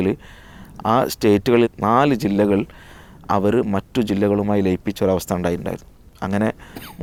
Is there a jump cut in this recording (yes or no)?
no